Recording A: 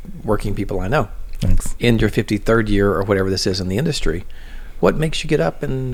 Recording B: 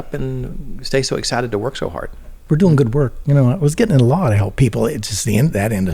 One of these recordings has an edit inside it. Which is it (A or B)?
B